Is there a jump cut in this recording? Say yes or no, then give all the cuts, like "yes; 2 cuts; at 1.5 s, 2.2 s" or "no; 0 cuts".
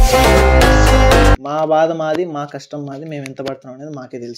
yes; 1 cut; at 1.4 s